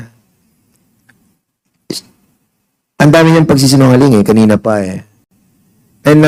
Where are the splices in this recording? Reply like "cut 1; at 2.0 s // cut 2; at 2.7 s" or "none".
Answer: none